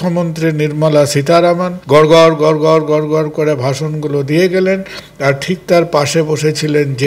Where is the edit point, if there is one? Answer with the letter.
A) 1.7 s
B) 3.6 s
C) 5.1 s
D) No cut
A